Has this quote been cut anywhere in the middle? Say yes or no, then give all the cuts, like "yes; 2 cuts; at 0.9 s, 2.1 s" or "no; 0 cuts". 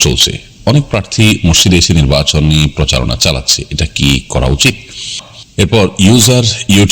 yes; 1 cut; at 5.4 s